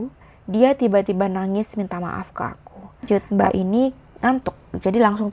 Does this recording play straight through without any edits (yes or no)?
no